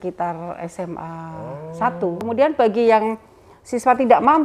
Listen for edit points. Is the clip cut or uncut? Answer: cut